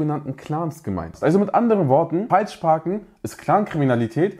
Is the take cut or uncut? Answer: cut